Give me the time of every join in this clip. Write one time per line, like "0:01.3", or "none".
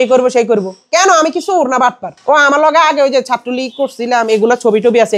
0:02.1